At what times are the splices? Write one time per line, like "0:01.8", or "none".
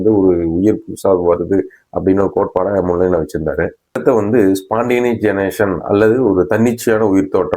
0:04.0